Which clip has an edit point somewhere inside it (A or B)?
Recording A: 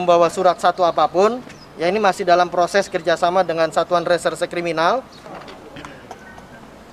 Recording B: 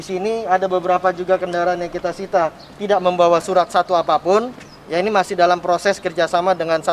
A